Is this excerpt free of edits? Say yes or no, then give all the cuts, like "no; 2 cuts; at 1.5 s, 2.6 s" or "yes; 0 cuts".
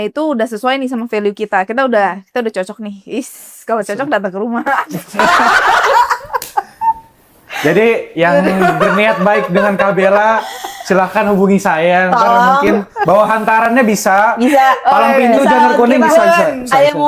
yes; 0 cuts